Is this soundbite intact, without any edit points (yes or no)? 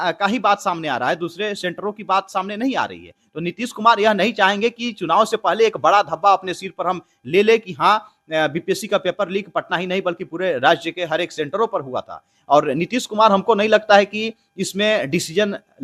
yes